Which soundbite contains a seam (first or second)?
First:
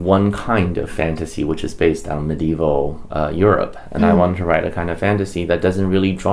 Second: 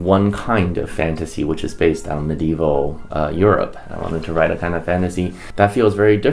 second